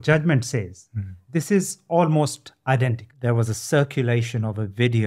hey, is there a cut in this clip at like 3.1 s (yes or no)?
yes